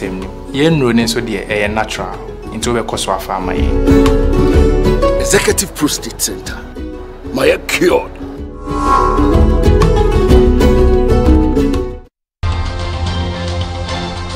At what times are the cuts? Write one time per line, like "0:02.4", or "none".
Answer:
0:12.4